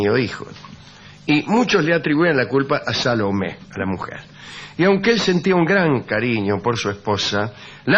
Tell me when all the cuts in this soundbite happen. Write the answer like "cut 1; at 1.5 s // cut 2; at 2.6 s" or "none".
cut 1; at 5.8 s